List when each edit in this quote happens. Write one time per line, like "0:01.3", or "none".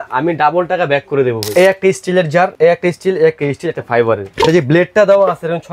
0:01.4
0:02.5
0:04.3